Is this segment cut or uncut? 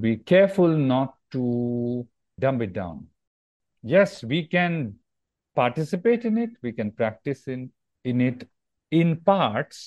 cut